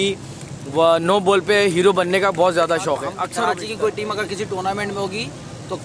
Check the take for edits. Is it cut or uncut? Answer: cut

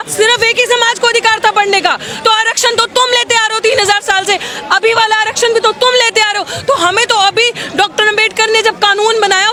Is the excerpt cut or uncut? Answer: uncut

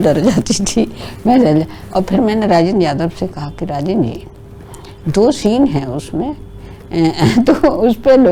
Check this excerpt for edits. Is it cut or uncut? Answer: uncut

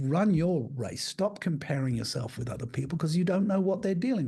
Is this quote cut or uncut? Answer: uncut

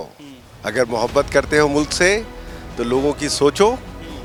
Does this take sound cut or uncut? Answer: uncut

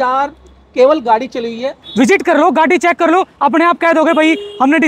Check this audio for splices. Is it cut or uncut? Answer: cut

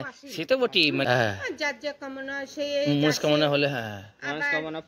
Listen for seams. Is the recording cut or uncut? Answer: cut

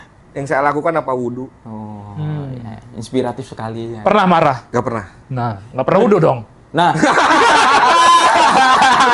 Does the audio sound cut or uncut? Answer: cut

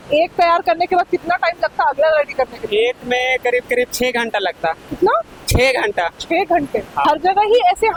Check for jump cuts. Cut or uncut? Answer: uncut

